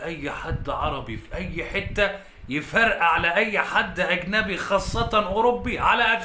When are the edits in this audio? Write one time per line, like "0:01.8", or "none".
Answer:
none